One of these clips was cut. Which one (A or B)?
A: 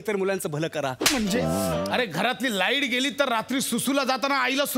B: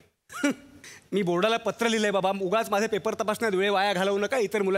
A